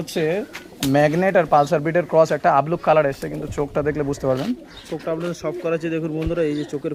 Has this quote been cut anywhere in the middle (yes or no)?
no